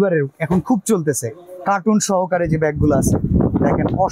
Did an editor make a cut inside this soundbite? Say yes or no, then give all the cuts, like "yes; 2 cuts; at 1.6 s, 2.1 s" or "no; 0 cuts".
no; 0 cuts